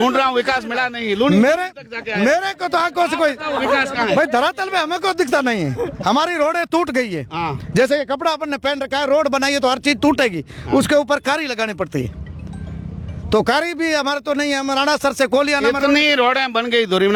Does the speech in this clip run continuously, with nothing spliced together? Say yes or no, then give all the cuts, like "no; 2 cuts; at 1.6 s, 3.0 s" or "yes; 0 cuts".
yes; 0 cuts